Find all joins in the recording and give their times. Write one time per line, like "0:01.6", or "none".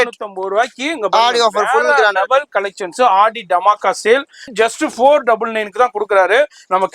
0:04.5